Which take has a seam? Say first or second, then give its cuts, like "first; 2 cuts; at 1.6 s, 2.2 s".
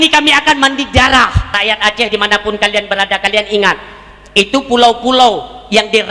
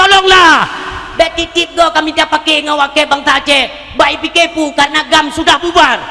first; 1 cut; at 1.5 s